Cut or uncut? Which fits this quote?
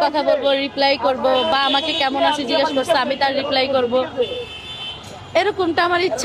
uncut